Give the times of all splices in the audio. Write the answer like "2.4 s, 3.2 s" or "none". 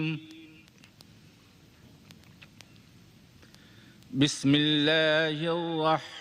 1.0 s